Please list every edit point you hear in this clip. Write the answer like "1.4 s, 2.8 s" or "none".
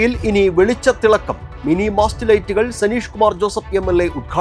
none